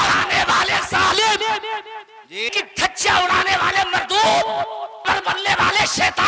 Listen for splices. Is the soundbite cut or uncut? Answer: cut